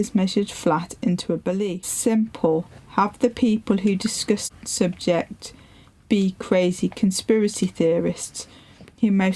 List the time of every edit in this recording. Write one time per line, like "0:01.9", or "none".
0:01.9
0:04.5